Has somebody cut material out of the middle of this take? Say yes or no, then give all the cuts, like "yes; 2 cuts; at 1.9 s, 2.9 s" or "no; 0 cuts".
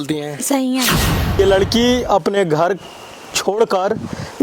yes; 1 cut; at 1.4 s